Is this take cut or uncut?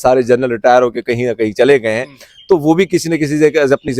uncut